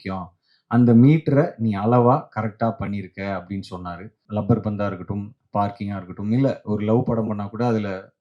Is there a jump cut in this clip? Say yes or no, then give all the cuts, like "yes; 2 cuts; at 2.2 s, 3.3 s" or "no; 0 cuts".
yes; 1 cut; at 4.1 s